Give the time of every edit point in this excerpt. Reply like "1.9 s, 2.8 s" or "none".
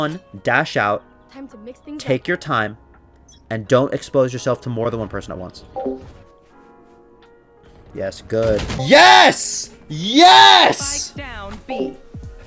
4.8 s, 8.8 s